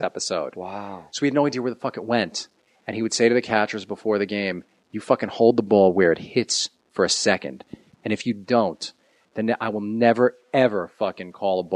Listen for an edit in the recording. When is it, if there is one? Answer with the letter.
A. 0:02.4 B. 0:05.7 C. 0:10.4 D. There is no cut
B